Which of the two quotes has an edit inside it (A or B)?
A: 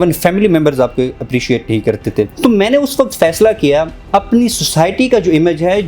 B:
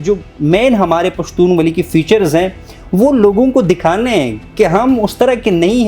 A